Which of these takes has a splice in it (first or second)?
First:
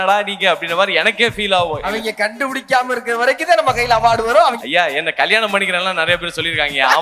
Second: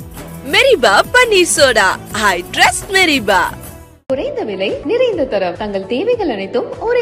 first